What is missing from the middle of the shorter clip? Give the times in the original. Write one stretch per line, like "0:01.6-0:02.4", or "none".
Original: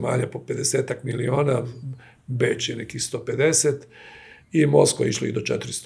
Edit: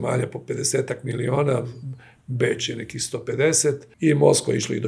0:03.9-0:04.4